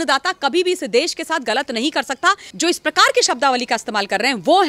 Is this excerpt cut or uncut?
cut